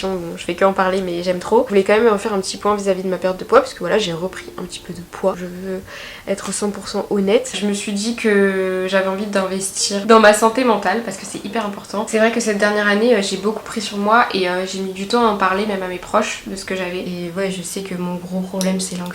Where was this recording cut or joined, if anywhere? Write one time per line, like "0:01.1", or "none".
0:01.7
0:05.4
0:07.5
0:10.0
0:12.1
0:17.0